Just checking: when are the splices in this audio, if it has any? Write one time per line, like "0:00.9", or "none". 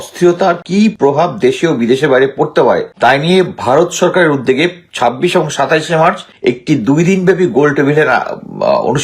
0:00.8
0:02.9
0:06.3